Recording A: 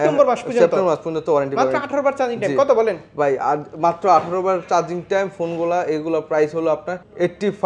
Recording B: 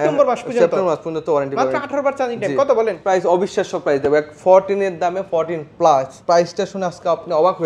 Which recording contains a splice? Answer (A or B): B